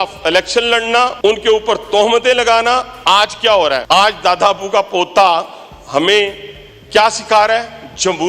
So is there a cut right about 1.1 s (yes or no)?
yes